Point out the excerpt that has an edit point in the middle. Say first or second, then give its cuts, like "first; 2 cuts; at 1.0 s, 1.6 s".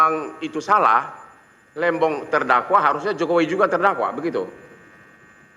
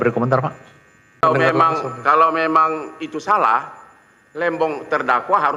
second; 1 cut; at 1.2 s